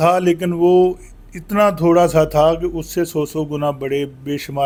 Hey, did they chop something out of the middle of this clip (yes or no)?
no